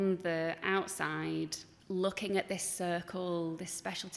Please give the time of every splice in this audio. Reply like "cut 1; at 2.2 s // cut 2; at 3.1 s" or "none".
cut 1; at 1.7 s

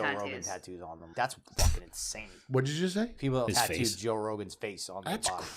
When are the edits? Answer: cut 1; at 1.0 s // cut 2; at 3.4 s

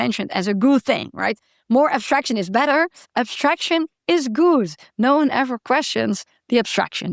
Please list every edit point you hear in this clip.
cut 1; at 3.0 s

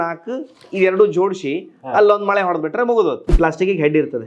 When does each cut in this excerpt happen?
cut 1; at 3.3 s

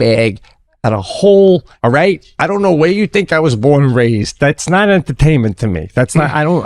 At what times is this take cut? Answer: cut 1; at 1.7 s

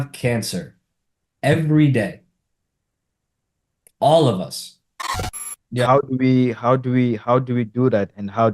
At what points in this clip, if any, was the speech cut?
cut 1; at 5.3 s

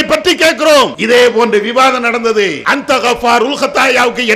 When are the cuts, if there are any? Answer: cut 1; at 1.0 s // cut 2; at 2.6 s

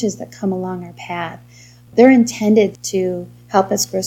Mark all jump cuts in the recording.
cut 1; at 1.9 s // cut 2; at 2.8 s

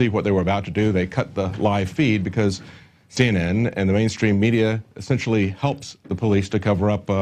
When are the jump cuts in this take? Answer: cut 1; at 1.3 s

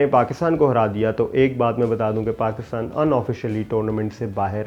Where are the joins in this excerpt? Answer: none

